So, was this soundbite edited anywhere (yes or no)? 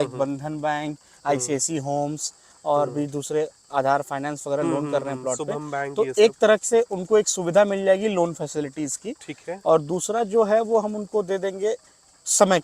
no